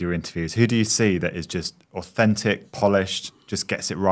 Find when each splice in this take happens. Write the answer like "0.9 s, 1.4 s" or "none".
none